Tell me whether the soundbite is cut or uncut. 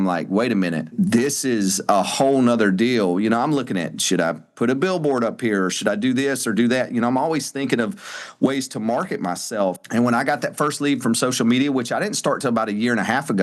cut